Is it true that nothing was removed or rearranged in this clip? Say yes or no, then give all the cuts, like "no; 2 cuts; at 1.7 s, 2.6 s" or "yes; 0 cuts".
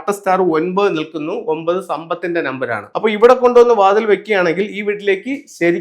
no; 1 cut; at 2.8 s